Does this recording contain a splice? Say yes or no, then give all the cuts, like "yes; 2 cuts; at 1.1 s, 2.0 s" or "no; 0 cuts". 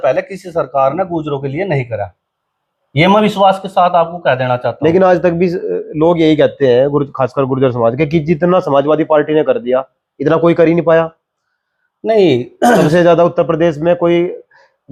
no; 0 cuts